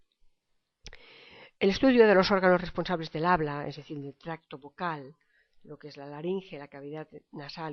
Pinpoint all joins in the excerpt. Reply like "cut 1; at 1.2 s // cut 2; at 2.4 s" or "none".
cut 1; at 5.2 s

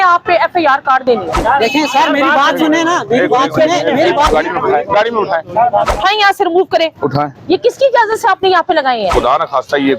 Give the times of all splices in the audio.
cut 1; at 1.4 s // cut 2; at 4.3 s // cut 3; at 5.9 s // cut 4; at 9.1 s

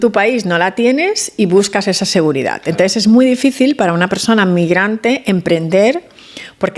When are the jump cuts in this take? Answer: none

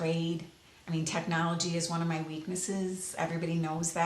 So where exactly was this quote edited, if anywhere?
none

